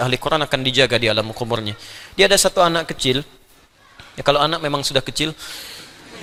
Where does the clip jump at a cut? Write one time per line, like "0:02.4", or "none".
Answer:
none